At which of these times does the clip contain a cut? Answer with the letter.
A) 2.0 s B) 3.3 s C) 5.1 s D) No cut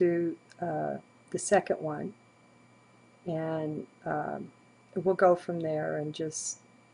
C